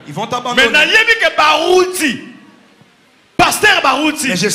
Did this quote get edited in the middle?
no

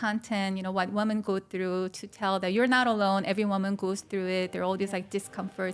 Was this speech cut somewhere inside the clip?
no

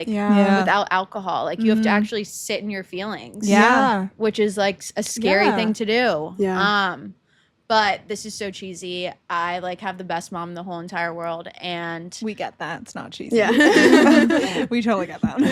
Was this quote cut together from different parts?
no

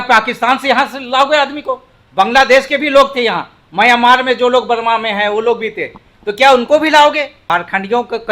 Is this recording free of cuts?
no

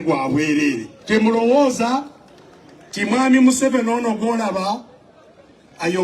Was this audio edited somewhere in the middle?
yes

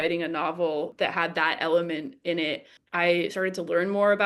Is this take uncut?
no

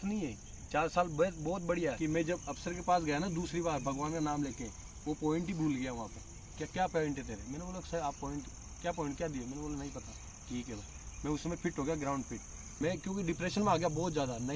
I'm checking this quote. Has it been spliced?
yes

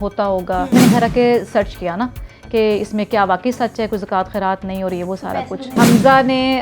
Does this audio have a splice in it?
yes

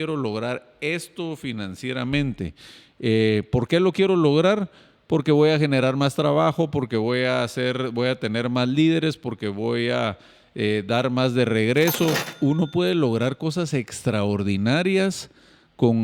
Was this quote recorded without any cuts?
no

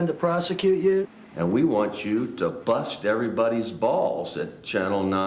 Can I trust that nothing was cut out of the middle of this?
no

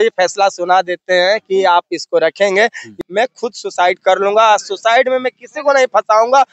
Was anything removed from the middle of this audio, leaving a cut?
yes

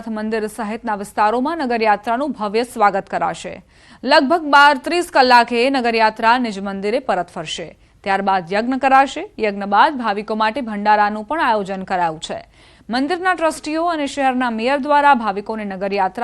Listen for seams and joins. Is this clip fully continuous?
no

